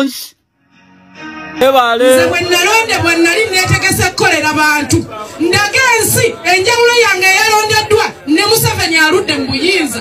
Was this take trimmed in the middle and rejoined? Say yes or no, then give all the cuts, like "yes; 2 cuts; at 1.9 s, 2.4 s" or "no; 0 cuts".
yes; 1 cut; at 1.6 s